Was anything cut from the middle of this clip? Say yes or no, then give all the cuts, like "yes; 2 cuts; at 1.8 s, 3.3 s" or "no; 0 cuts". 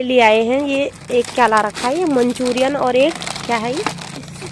no; 0 cuts